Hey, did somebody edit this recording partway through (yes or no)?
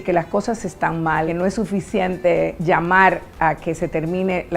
yes